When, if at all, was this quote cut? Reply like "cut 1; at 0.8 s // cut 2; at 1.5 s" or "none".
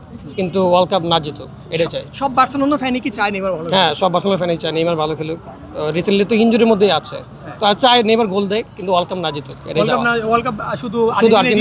none